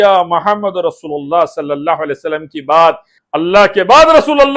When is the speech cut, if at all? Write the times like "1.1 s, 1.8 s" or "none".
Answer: 3.1 s

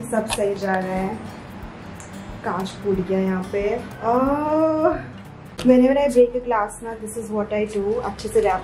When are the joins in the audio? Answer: none

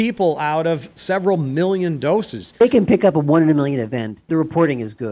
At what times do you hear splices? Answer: 2.6 s

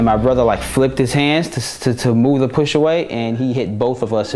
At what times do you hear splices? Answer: none

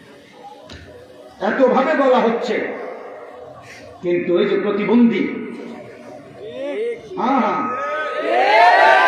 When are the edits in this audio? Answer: none

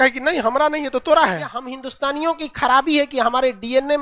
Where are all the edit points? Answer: 1.8 s

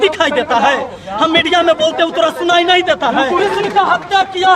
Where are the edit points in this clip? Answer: 3.4 s

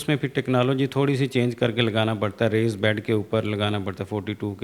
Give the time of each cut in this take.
none

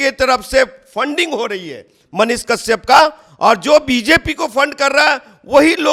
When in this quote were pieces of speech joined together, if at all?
none

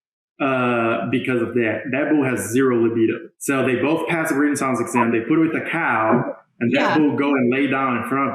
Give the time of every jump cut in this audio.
3.3 s

